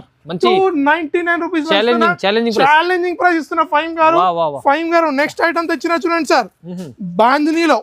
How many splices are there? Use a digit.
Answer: 0